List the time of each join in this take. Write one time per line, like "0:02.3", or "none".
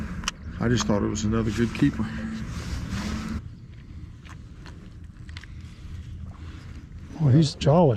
none